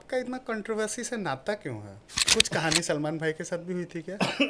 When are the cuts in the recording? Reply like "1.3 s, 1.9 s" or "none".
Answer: 2.2 s